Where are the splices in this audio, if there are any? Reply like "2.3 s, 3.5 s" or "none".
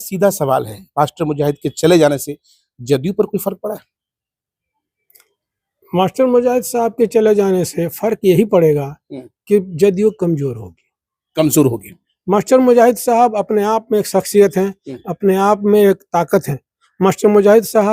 none